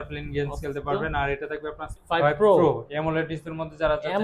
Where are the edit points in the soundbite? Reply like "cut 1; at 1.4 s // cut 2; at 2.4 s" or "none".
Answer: cut 1; at 2.0 s